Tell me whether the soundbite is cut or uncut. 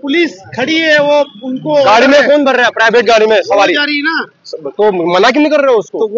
uncut